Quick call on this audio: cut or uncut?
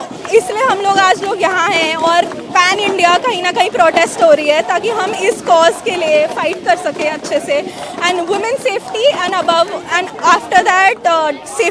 uncut